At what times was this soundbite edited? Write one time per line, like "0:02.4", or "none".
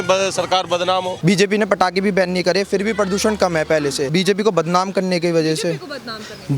0:01.1
0:04.1

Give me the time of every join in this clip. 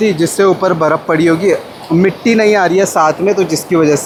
none

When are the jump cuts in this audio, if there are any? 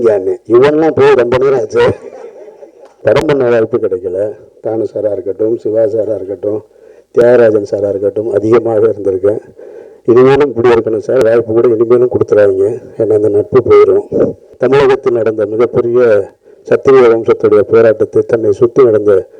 0:02.9
0:14.4

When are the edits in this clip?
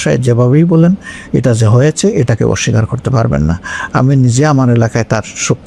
none

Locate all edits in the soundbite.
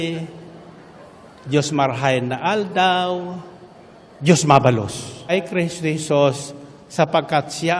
0:05.3

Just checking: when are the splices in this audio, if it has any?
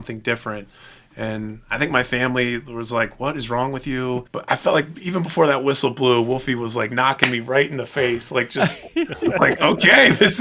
0:04.3

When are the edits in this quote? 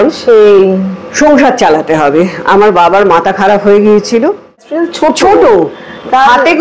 0:04.8

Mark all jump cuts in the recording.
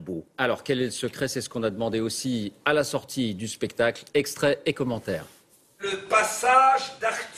none

